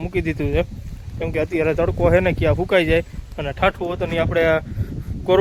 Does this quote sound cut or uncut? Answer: uncut